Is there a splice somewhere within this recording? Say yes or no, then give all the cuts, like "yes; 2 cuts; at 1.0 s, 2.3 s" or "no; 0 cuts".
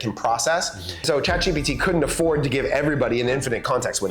yes; 1 cut; at 1.1 s